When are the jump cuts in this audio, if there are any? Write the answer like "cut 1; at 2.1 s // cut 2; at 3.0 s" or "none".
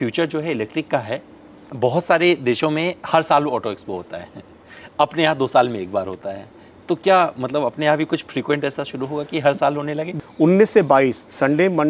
cut 1; at 1.6 s // cut 2; at 10.1 s